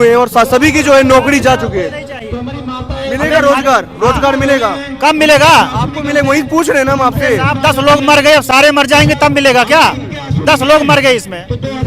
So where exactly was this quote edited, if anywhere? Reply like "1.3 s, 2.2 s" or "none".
none